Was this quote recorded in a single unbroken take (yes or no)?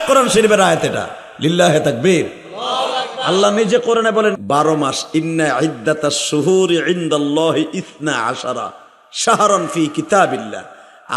no